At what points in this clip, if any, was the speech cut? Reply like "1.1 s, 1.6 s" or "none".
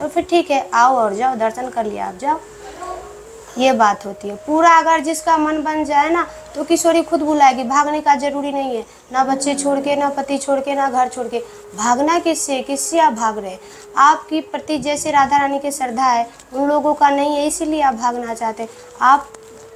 none